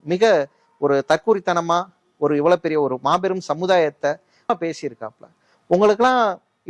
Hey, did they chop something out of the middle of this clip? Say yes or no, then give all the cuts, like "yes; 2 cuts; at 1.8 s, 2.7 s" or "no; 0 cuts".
no; 0 cuts